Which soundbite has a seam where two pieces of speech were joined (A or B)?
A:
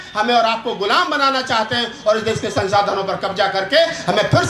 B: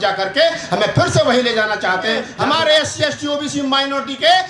B